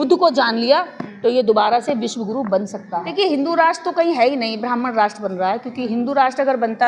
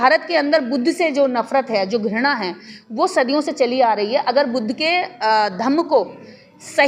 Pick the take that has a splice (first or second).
first